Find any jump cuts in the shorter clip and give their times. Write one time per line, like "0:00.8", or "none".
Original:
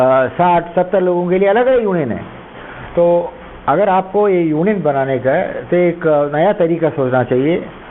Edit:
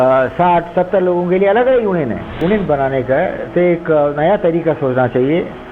0:02.4

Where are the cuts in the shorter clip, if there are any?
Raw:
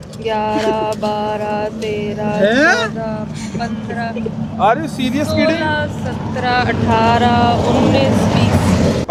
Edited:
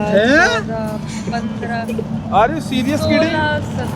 none

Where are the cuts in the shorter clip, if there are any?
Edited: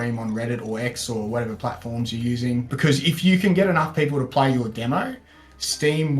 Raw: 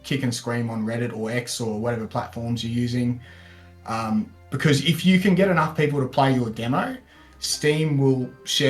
0:02.7

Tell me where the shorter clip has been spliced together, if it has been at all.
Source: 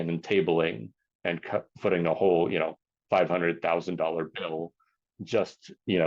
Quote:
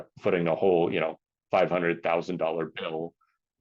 none

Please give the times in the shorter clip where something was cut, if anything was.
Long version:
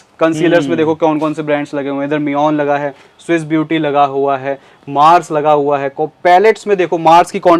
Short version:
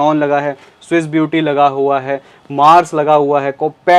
none

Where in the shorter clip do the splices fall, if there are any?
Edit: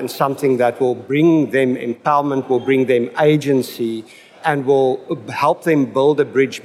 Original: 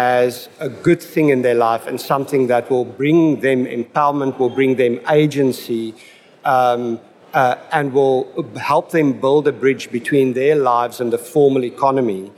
0:04.4

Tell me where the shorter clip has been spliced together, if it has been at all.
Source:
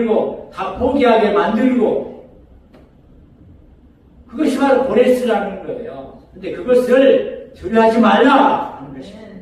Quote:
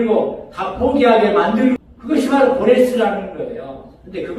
0:01.8

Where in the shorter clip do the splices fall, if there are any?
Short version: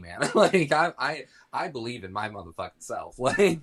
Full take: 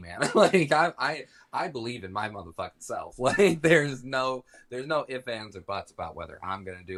none

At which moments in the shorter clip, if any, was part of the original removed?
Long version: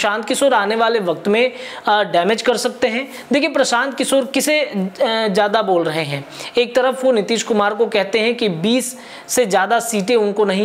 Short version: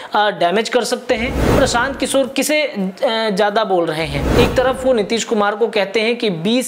0:01.5
0:04.2

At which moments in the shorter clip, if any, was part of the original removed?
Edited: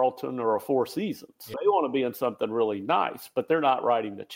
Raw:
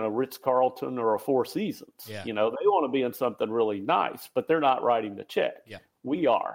0:01.6

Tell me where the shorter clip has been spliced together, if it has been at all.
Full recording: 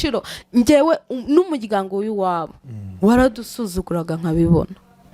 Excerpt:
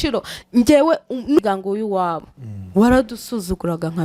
0:01.4

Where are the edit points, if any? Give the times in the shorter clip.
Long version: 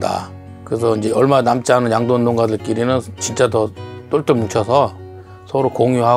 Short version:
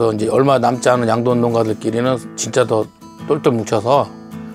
none

